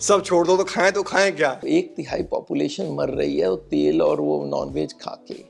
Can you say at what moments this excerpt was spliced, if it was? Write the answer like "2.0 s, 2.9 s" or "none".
1.6 s